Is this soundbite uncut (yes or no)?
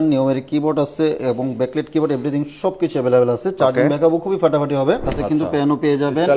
no